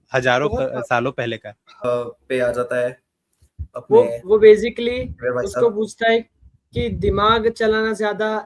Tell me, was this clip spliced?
yes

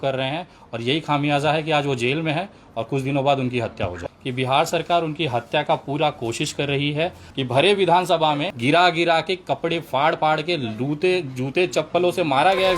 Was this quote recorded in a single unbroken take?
no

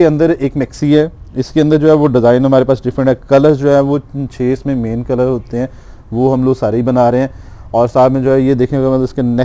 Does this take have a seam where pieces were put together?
no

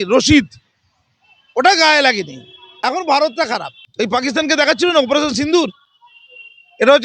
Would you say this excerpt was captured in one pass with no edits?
no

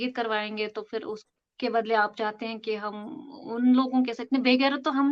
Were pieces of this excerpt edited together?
no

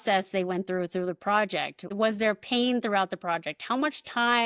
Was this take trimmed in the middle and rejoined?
no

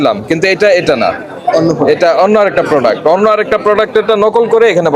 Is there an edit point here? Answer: no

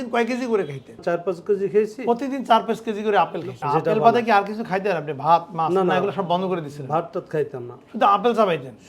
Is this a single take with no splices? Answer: no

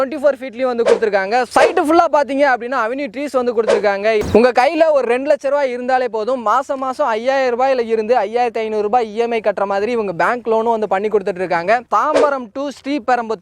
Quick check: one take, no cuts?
no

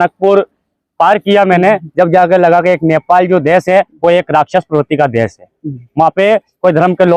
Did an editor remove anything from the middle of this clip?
no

